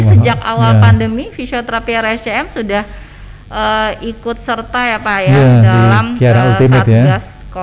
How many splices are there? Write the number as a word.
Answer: zero